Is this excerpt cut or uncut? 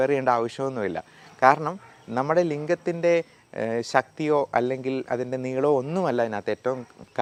uncut